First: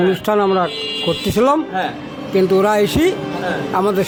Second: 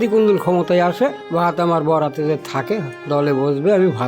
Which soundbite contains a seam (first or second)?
second